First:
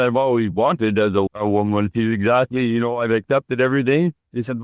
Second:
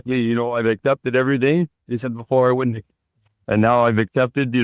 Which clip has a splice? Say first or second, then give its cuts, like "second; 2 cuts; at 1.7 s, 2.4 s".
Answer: first; 1 cut; at 1.3 s